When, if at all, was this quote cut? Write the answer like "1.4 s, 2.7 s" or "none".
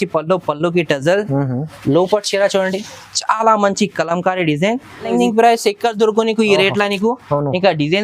5.1 s